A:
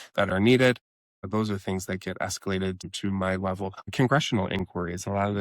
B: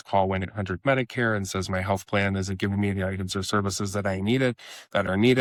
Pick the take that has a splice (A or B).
A